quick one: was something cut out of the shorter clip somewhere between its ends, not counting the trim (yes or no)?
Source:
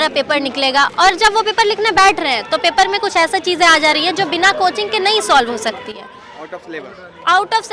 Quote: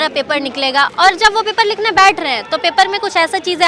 no